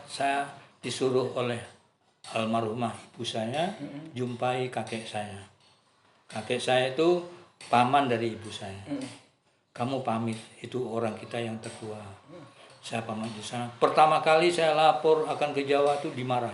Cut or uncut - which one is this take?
uncut